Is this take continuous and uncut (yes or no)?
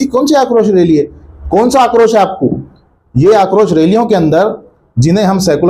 yes